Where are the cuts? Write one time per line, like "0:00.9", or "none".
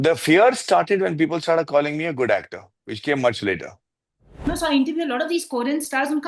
0:04.5